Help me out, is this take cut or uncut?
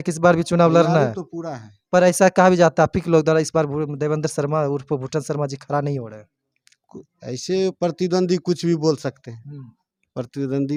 uncut